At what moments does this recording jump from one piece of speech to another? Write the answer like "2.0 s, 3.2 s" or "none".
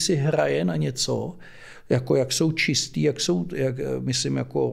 none